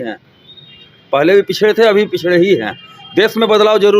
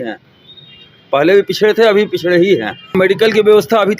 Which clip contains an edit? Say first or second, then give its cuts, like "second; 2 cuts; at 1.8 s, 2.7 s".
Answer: second; 1 cut; at 2.9 s